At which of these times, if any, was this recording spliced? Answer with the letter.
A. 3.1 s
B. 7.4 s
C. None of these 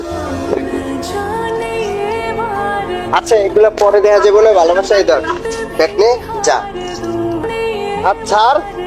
B